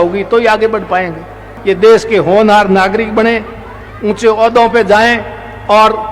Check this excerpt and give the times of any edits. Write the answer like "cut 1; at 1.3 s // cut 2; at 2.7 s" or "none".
cut 1; at 1.5 s